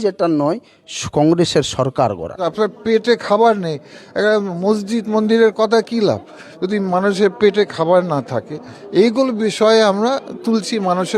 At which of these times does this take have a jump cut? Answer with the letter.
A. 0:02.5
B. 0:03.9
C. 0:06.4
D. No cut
A